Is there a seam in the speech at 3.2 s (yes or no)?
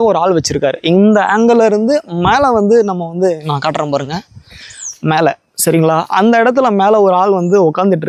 no